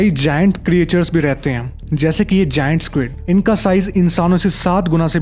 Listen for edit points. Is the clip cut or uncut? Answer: uncut